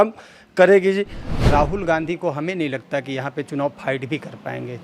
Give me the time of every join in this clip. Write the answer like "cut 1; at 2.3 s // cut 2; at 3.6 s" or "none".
cut 1; at 1.2 s